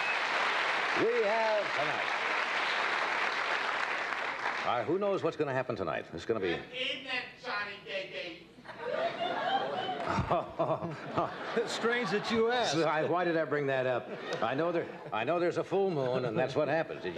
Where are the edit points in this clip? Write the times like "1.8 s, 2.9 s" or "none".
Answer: none